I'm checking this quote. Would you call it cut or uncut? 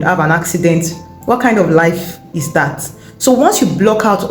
uncut